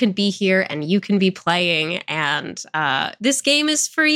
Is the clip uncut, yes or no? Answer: yes